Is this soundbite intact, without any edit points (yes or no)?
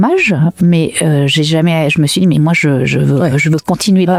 yes